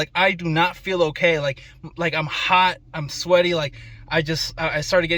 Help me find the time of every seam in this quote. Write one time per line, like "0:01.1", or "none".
none